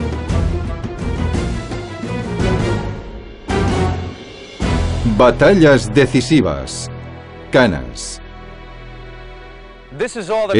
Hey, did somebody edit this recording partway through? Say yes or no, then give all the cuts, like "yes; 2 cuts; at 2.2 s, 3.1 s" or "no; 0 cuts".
no; 0 cuts